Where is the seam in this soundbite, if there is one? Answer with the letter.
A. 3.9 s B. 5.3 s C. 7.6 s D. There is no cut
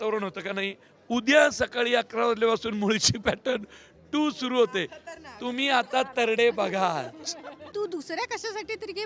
C